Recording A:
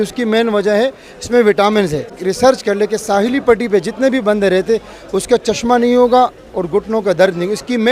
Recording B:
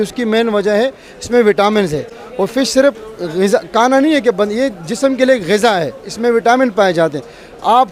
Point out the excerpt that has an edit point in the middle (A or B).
A